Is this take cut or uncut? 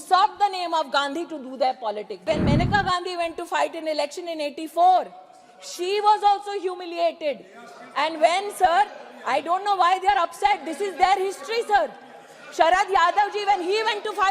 cut